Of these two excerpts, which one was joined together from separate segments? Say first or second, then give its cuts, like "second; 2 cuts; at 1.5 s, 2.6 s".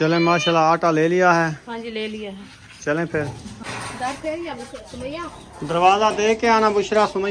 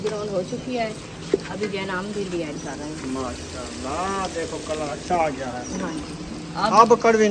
first; 1 cut; at 3.5 s